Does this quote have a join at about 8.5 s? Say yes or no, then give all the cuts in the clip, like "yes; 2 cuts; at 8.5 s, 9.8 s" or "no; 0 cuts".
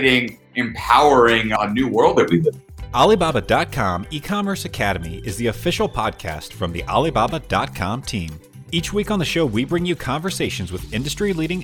no; 1 cut; at 2.7 s